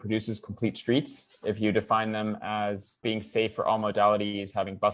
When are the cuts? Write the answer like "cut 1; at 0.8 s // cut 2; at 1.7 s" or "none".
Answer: none